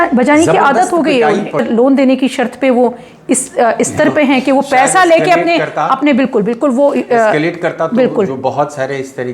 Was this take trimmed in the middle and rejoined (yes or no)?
yes